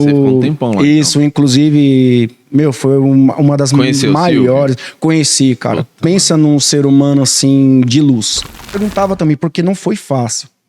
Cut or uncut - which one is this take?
cut